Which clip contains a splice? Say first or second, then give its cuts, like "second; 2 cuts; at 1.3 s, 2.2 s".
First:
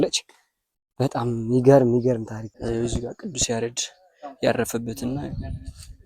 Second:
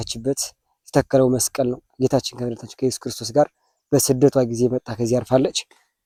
first; 1 cut; at 2.6 s